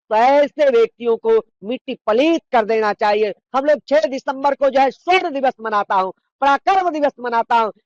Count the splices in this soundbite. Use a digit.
1